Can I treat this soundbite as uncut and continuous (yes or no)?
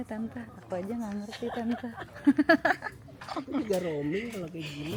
yes